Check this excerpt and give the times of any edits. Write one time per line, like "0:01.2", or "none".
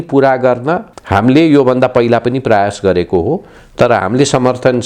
0:00.9